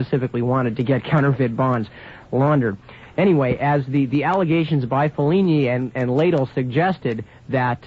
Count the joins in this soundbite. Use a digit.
1